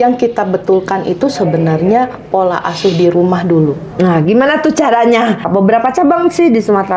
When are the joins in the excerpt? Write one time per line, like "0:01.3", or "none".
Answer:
0:05.4